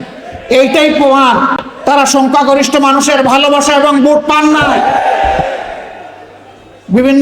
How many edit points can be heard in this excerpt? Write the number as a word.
one